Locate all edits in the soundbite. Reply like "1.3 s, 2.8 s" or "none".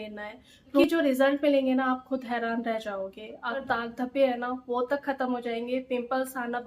0.8 s, 3.6 s